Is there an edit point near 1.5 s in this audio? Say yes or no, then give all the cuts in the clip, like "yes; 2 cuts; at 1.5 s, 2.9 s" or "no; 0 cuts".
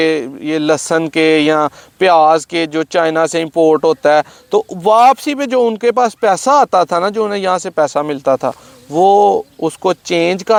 no; 0 cuts